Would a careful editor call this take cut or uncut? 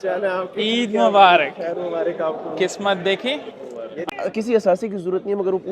cut